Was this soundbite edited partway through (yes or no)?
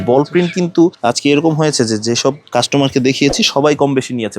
yes